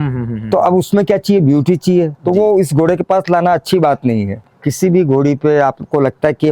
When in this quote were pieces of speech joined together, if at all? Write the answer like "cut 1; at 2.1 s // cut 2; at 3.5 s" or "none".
cut 1; at 4.4 s